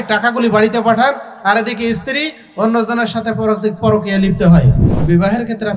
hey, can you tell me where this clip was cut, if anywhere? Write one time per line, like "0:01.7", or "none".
0:04.9